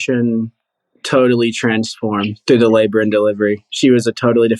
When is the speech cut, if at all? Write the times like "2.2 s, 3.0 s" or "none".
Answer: 3.7 s